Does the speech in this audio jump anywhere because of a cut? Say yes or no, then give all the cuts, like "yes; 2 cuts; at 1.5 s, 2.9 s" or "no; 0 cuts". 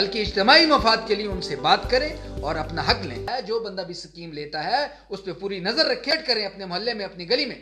yes; 2 cuts; at 3.3 s, 6.1 s